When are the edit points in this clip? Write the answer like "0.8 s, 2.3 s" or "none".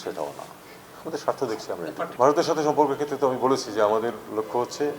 2.1 s